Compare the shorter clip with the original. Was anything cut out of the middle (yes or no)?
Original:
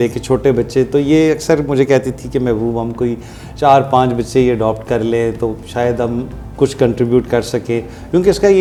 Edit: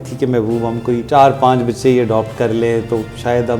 yes